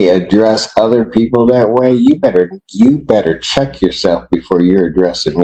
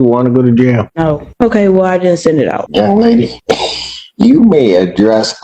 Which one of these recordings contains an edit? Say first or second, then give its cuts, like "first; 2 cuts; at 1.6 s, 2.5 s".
second; 3 cuts; at 1.1 s, 2.6 s, 3.4 s